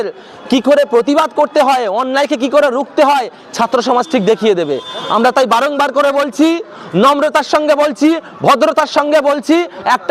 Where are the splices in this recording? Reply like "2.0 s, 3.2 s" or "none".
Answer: none